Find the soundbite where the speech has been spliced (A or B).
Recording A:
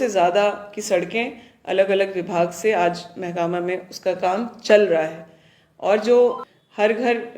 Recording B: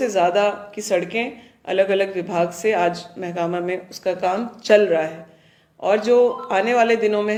A